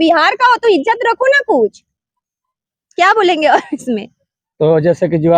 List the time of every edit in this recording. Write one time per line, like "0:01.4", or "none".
none